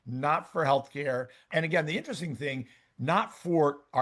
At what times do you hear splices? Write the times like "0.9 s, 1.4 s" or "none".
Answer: 1.5 s